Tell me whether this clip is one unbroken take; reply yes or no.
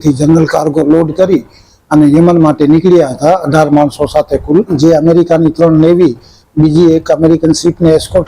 no